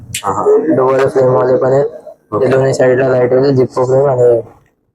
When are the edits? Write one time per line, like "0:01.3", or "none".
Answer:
none